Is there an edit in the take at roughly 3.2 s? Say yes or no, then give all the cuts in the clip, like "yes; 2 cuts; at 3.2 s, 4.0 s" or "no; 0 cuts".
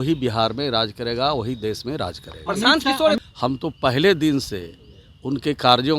yes; 1 cut; at 3.2 s